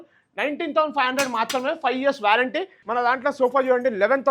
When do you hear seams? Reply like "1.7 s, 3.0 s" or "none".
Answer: 2.8 s